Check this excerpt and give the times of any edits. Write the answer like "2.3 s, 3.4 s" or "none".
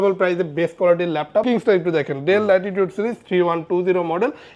1.4 s